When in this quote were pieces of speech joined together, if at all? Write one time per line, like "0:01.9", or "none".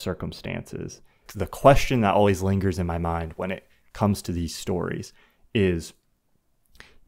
0:01.3